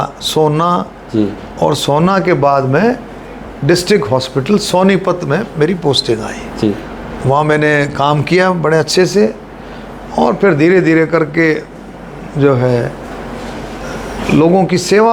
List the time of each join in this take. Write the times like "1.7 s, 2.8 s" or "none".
none